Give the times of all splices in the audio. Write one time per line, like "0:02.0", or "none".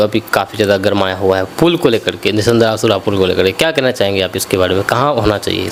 none